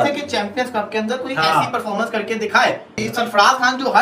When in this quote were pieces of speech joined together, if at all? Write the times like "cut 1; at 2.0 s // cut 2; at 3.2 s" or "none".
none